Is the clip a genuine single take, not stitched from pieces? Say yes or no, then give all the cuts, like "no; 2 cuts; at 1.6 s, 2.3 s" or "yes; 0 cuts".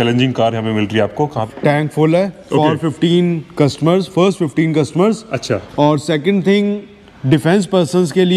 no; 1 cut; at 1.4 s